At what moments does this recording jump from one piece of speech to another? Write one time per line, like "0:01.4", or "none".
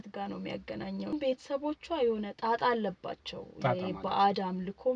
0:01.1